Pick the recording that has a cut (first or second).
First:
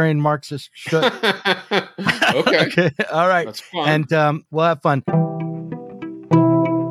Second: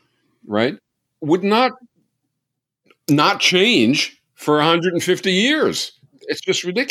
first